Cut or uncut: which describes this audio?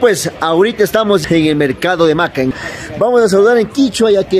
cut